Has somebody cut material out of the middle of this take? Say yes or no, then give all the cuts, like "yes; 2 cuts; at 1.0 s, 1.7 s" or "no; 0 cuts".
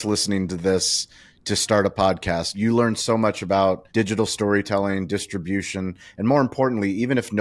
yes; 2 cuts; at 2.5 s, 3.8 s